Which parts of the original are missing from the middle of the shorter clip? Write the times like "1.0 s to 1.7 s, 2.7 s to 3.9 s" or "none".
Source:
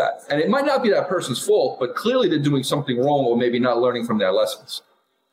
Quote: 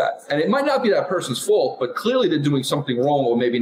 none